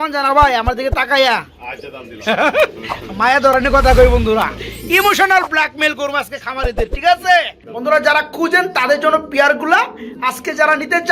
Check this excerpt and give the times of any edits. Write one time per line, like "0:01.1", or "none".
0:07.6

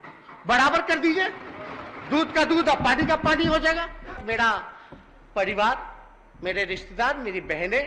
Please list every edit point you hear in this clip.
0:04.2

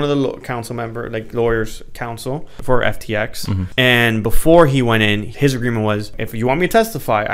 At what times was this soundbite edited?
0:02.5
0:03.7
0:05.3
0:06.2

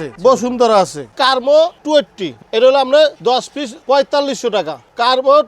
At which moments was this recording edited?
0:01.1

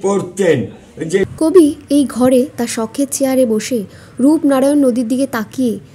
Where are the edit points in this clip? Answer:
0:01.3

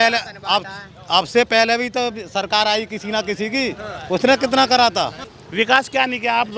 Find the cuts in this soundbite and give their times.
0:05.2

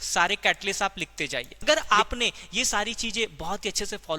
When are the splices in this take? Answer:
0:01.9

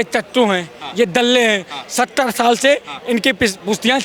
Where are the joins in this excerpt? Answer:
none

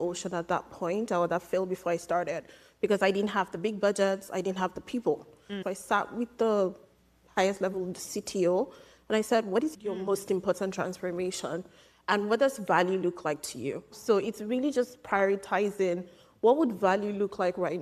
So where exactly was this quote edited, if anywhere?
0:05.6
0:09.7
0:13.9

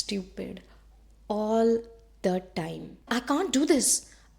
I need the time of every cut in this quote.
0:03.1

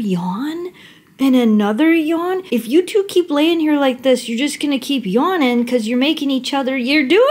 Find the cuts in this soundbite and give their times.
0:02.4

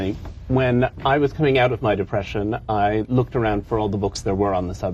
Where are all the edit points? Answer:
none

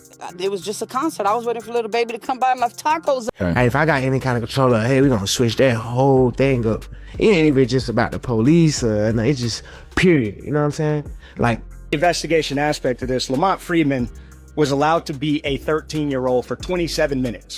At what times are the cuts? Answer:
0:03.3
0:11.8

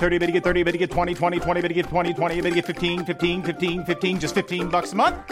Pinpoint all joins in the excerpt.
none

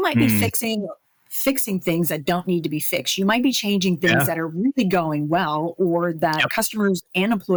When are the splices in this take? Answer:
none

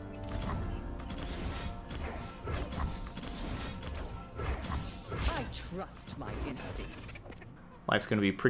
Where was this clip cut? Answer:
0:07.6

